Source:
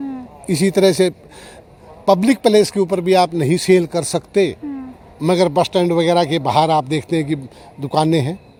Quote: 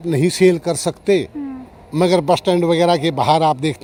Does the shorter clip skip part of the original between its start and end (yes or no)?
no